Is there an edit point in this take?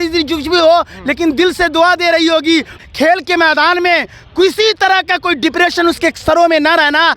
yes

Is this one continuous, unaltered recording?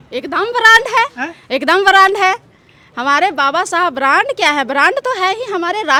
yes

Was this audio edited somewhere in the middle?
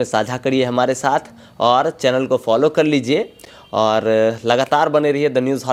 no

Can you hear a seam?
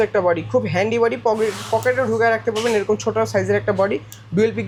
no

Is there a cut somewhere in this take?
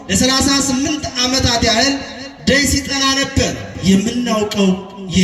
yes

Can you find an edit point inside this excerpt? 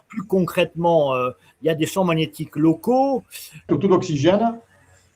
yes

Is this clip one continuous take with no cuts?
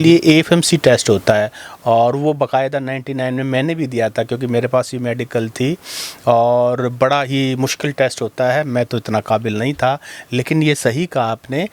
yes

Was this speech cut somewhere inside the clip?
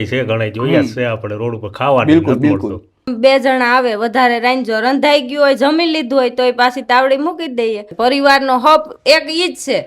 yes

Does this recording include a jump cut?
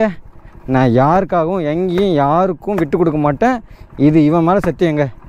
no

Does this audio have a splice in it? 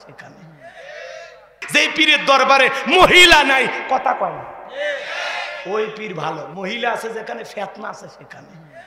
yes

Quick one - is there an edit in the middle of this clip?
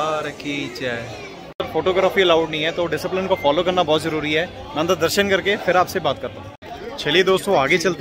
yes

